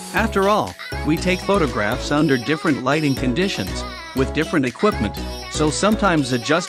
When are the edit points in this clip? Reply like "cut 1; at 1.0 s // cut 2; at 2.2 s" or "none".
none